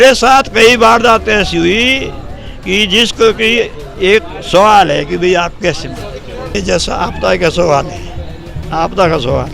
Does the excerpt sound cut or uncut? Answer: cut